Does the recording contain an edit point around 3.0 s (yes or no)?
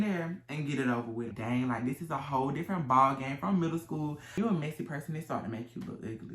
no